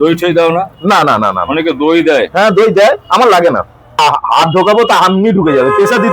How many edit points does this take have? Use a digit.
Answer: 1